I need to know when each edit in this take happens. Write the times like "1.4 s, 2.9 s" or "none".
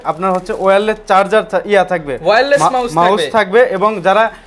none